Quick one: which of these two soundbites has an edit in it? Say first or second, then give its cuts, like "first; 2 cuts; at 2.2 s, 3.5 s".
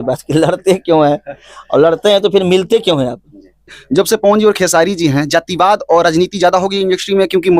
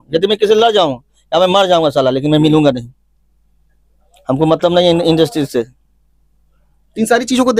first; 1 cut; at 3.7 s